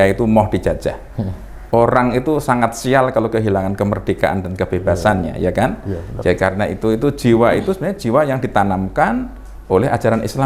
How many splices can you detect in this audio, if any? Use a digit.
0